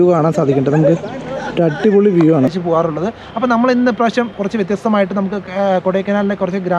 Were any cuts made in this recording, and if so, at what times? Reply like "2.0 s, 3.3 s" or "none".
2.5 s